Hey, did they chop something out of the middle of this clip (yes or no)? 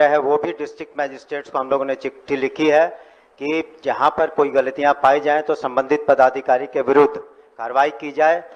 no